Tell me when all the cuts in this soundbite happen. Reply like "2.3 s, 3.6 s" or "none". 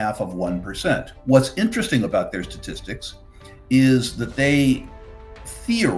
1.1 s